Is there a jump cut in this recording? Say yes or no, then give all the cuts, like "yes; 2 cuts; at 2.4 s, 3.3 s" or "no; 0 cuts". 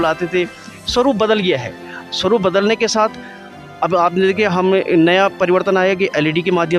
no; 0 cuts